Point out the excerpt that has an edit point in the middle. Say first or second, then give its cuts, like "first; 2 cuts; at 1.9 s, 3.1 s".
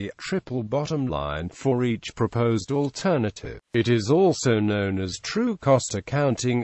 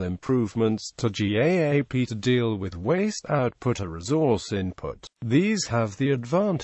first; 1 cut; at 5.2 s